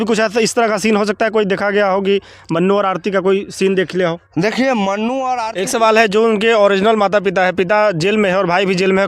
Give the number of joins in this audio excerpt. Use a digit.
1